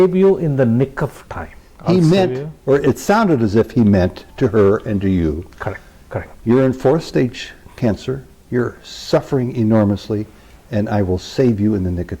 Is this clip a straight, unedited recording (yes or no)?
no